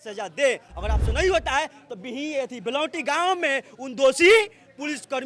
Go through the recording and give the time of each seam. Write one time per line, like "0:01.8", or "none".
none